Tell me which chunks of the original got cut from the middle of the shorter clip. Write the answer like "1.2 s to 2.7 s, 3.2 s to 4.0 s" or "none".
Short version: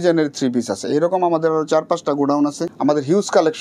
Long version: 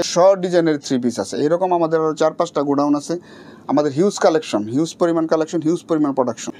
3.2 s to 3.5 s